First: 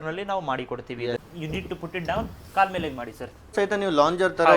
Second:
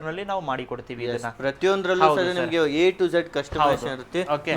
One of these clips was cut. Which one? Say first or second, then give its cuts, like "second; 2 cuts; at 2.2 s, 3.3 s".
first; 2 cuts; at 1.2 s, 3.5 s